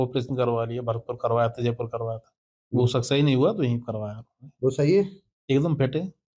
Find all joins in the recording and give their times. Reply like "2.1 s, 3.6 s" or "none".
none